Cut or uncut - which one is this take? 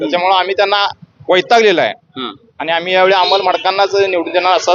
uncut